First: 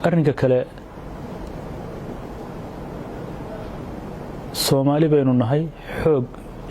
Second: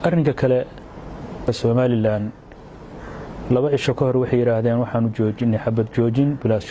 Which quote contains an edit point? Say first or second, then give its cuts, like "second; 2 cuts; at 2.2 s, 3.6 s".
second; 1 cut; at 1.5 s